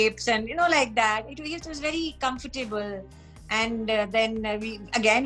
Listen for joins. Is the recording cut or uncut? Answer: uncut